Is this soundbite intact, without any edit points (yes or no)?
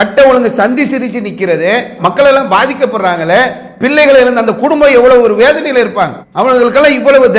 yes